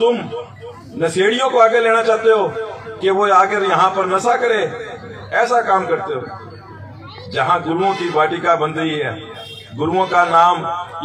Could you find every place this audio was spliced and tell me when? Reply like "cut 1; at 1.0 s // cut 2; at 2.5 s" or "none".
none